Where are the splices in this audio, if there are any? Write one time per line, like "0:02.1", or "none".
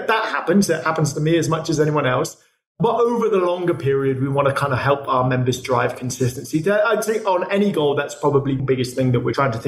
0:08.6